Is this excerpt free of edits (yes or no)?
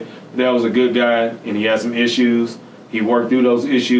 yes